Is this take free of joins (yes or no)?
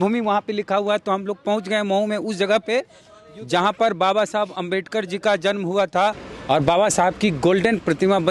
yes